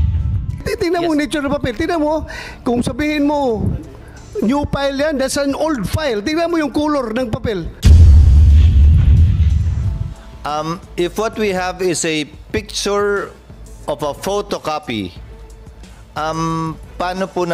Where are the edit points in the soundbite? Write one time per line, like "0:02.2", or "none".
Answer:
0:07.7
0:09.9